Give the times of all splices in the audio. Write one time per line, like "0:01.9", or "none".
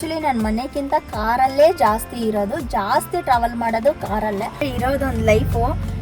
0:04.6

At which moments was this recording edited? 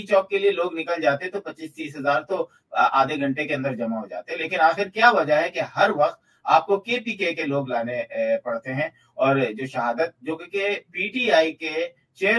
none

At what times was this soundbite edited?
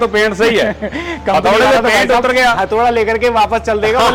none

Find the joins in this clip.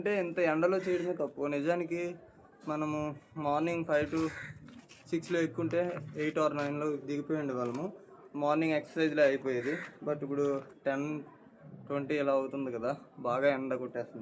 none

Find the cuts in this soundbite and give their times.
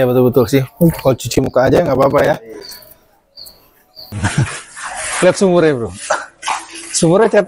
0:04.1

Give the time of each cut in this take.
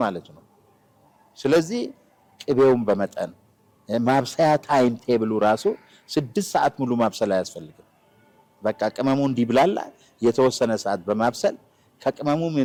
none

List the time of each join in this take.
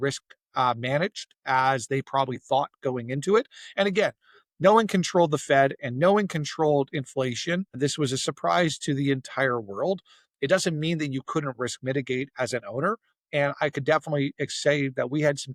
none

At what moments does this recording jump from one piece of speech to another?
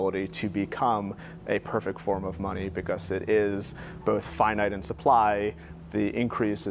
none

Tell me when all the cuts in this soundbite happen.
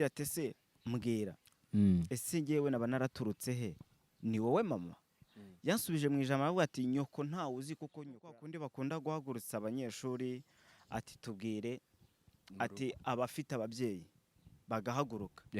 0:08.3

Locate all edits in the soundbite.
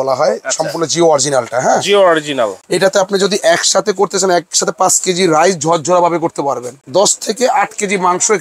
0:02.7
0:06.7

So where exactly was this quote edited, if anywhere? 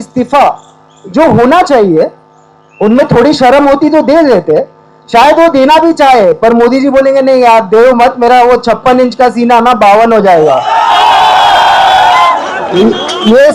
0:12.4

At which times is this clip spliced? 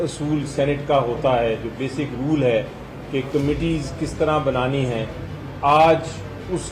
none

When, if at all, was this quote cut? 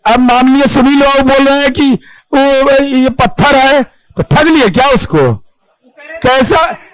none

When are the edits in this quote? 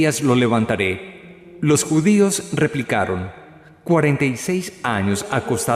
none

